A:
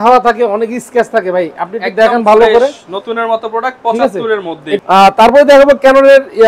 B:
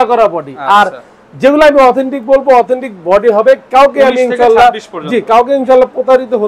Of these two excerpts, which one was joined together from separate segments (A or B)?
A